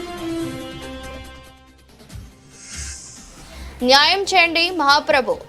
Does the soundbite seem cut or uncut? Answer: uncut